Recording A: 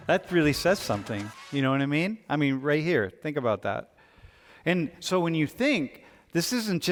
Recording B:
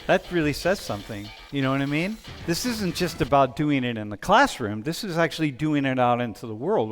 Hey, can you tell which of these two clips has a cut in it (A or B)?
B